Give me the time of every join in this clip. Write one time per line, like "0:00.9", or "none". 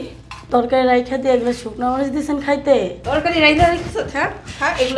0:03.0